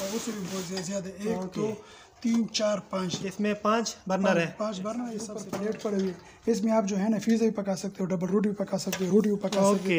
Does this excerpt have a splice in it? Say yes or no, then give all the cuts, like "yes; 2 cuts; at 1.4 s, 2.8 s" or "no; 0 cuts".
yes; 1 cut; at 5.3 s